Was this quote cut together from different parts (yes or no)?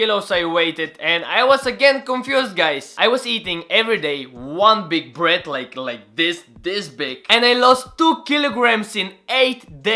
no